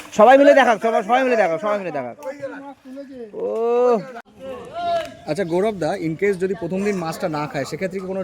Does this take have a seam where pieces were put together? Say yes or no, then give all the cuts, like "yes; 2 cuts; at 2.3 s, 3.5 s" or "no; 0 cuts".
yes; 1 cut; at 4.3 s